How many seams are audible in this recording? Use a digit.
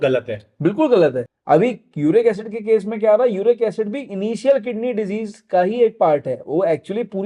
1